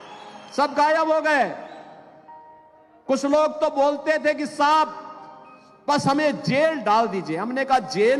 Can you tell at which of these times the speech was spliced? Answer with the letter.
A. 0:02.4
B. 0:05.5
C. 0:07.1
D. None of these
D